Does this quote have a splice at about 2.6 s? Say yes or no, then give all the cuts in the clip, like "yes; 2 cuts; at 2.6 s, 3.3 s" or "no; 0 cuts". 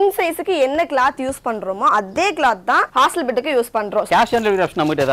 no; 1 cut; at 4.1 s